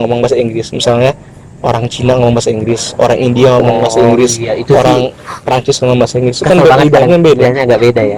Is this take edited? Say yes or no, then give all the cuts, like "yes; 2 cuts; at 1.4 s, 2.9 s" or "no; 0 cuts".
no; 0 cuts